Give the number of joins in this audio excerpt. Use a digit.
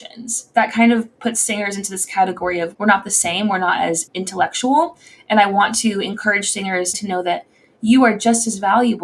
2